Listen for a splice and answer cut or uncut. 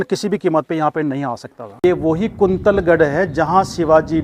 cut